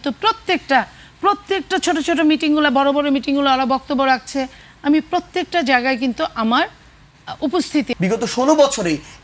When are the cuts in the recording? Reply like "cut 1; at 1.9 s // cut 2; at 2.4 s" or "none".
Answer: cut 1; at 7.9 s